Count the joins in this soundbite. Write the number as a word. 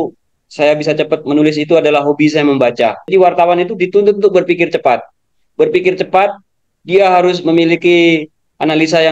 one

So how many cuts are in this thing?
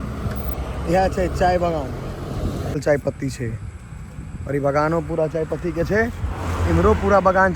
one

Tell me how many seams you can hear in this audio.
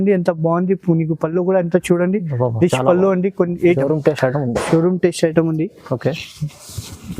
one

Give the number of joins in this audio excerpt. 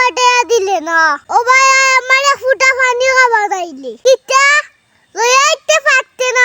one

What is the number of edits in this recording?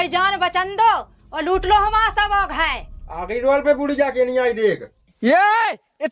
one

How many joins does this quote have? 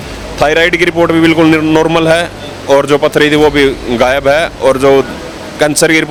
zero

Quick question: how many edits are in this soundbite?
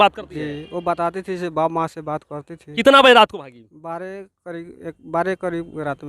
one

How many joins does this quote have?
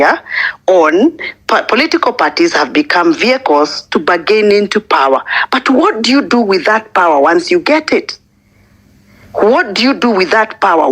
zero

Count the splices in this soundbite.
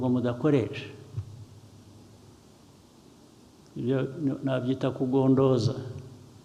zero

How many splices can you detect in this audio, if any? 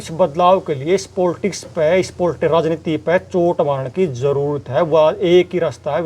zero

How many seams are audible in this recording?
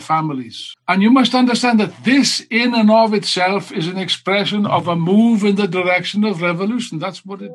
zero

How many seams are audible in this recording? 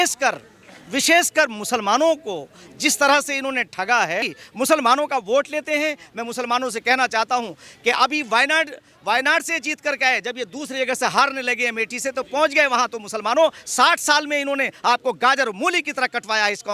one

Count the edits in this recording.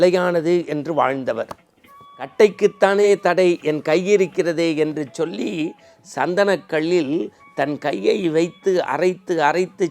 one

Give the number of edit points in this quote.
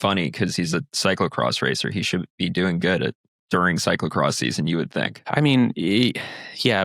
two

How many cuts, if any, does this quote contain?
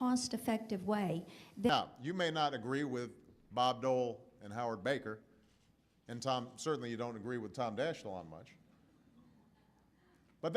one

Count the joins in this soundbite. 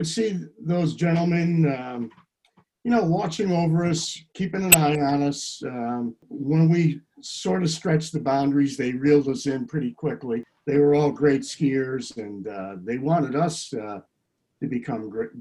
two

